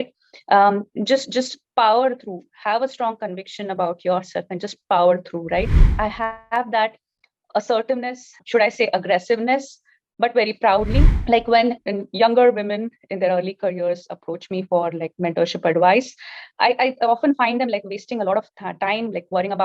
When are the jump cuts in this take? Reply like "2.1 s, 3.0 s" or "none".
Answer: 5.8 s, 11.1 s